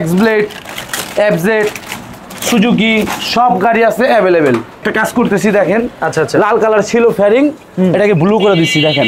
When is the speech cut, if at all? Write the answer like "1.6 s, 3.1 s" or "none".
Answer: 4.8 s